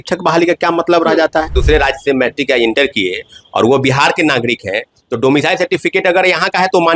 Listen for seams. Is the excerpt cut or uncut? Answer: cut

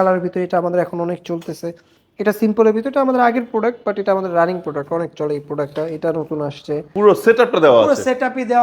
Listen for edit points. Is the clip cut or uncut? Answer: cut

